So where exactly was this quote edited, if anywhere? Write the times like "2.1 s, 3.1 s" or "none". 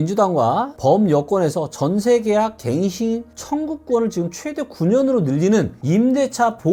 none